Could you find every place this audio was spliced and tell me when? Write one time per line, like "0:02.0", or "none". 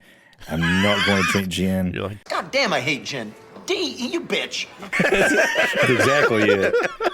none